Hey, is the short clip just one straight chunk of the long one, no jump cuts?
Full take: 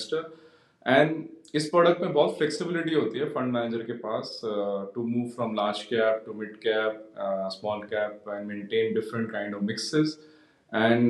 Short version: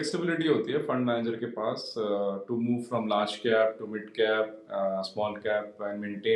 yes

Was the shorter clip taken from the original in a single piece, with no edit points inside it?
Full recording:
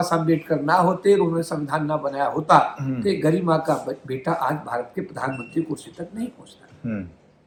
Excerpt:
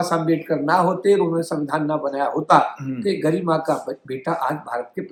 yes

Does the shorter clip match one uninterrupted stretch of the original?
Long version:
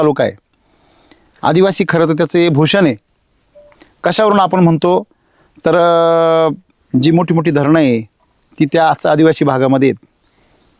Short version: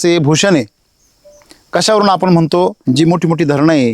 no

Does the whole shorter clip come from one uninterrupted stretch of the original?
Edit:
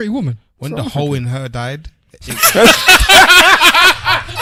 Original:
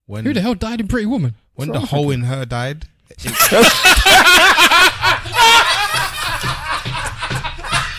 yes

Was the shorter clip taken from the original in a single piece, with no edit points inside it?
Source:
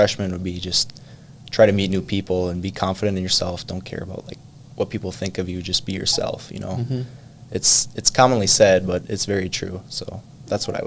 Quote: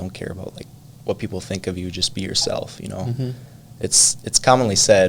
yes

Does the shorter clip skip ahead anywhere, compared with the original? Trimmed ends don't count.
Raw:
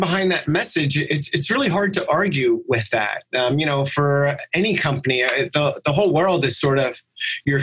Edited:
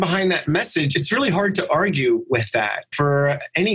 yes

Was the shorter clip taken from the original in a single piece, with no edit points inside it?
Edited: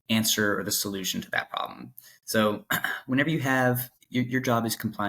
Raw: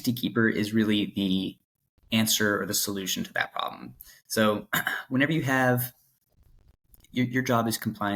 no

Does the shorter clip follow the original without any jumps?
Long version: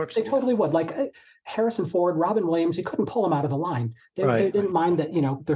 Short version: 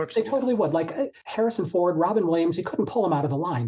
no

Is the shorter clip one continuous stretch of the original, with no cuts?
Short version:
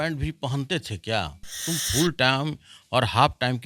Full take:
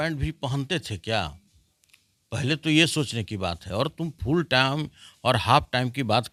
no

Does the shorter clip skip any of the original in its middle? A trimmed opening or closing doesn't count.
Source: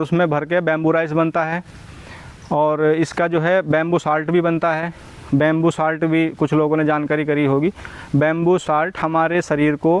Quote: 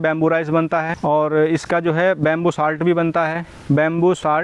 yes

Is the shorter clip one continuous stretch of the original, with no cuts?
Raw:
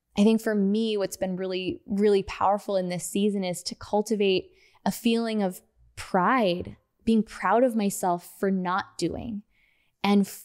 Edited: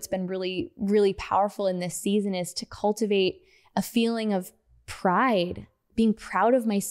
yes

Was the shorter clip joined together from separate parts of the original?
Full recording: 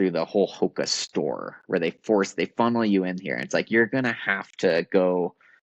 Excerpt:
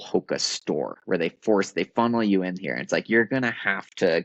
yes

